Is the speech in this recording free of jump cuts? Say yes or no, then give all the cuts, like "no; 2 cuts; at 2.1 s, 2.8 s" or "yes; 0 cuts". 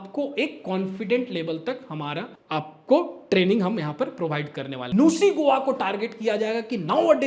no; 2 cuts; at 2.4 s, 4.8 s